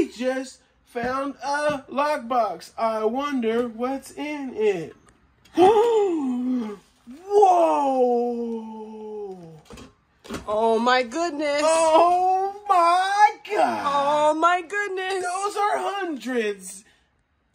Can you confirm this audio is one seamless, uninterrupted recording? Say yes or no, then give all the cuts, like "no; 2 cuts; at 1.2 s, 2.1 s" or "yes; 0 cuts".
yes; 0 cuts